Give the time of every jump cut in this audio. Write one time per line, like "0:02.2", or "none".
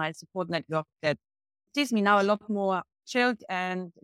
0:01.7